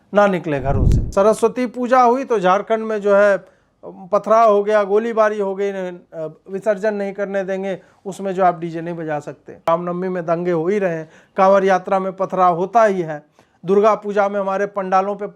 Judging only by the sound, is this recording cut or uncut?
cut